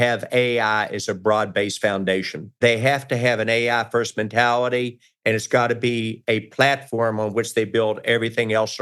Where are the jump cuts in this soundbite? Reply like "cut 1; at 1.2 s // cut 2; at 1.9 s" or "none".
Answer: cut 1; at 2.4 s